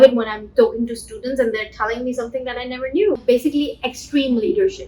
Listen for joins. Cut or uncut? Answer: cut